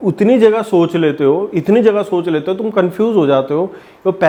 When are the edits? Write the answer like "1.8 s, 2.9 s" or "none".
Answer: none

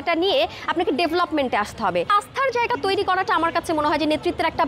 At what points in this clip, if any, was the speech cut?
2.1 s

